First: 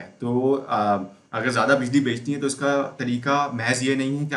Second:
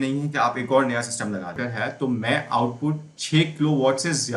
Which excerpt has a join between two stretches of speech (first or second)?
second